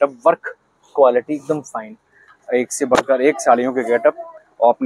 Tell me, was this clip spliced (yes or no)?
no